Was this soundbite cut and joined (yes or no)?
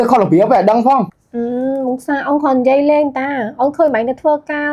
yes